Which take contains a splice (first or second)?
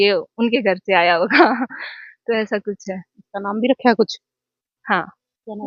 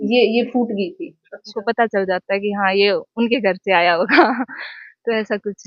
second